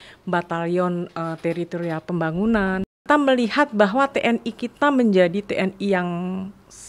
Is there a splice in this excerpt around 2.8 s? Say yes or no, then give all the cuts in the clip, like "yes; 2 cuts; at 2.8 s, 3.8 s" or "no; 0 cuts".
yes; 1 cut; at 2.8 s